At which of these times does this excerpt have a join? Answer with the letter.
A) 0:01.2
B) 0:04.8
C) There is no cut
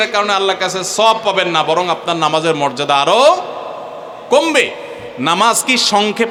C